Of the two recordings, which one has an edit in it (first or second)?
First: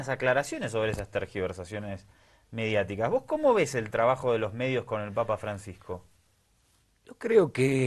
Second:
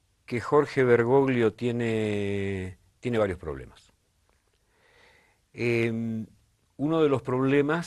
first